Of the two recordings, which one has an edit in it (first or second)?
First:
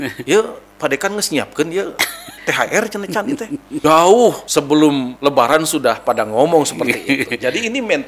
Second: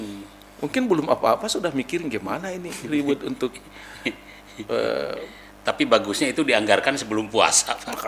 first